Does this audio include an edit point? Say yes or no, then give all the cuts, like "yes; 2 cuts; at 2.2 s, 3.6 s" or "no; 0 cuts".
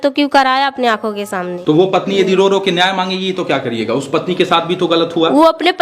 yes; 1 cut; at 1.5 s